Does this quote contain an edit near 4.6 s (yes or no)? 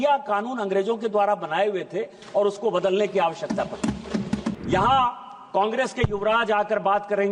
yes